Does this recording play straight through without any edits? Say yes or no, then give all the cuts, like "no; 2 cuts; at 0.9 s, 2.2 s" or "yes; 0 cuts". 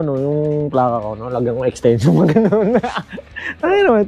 yes; 0 cuts